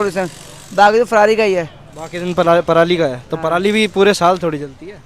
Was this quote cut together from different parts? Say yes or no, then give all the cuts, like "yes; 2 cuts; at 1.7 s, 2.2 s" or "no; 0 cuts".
no; 0 cuts